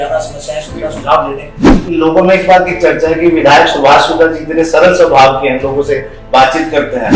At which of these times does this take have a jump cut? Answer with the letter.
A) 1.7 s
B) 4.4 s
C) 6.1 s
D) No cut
A